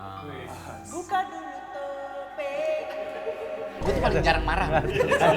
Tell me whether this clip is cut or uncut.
cut